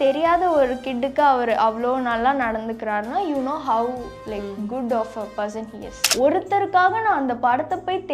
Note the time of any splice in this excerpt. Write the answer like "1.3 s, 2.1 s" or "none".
6.0 s